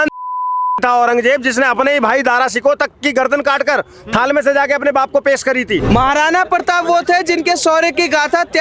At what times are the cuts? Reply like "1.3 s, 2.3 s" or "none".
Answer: 5.8 s